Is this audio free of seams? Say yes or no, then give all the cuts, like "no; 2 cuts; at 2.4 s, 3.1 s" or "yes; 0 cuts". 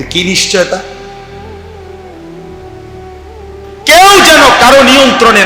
no; 2 cuts; at 1.3 s, 3.1 s